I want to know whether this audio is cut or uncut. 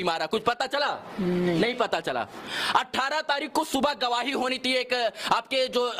uncut